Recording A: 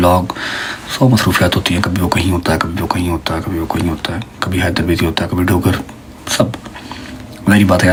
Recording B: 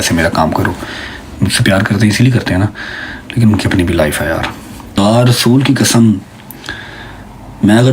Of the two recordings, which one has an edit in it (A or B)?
B